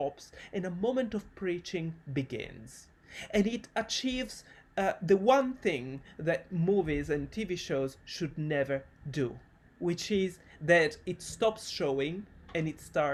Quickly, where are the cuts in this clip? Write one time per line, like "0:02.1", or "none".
none